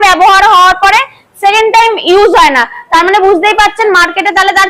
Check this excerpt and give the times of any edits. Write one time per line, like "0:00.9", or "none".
none